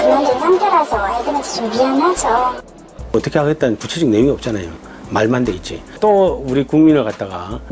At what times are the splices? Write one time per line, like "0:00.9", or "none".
0:03.1